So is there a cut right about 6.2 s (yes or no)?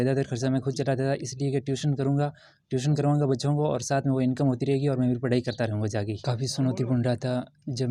yes